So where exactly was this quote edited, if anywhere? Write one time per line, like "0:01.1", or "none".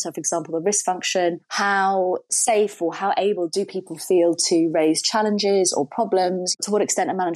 none